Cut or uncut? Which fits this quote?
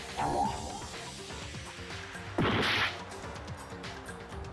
cut